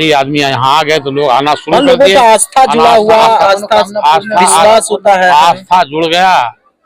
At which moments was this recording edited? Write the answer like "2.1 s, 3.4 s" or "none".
none